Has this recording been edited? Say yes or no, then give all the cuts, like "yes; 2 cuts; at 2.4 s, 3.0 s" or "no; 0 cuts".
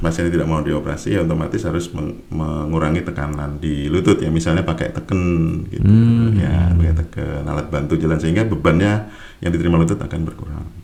no; 0 cuts